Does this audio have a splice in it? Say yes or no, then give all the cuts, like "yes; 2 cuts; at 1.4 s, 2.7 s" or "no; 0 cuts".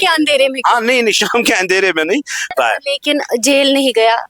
yes; 1 cut; at 2.5 s